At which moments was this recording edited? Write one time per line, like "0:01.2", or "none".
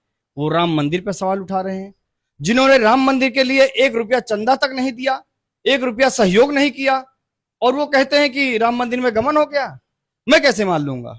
none